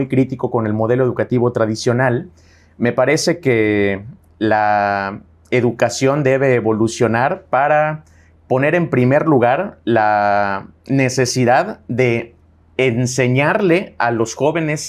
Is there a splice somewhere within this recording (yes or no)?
no